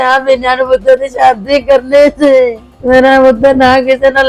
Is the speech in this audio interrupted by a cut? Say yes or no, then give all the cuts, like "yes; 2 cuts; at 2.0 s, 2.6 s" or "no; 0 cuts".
yes; 1 cut; at 2.7 s